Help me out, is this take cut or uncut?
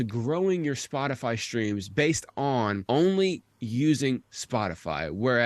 cut